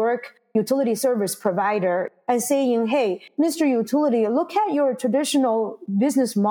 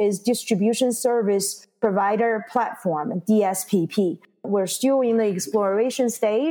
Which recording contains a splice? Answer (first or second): first